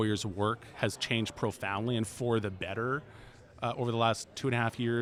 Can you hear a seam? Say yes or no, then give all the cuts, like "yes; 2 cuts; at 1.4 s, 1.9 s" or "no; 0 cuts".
no; 0 cuts